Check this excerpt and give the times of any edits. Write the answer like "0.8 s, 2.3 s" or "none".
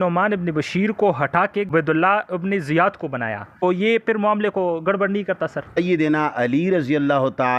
1.7 s, 3.6 s, 5.8 s